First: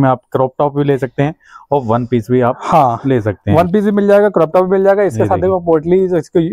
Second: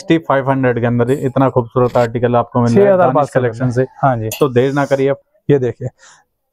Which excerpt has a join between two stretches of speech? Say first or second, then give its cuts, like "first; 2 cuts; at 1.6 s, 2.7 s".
second; 1 cut; at 5.2 s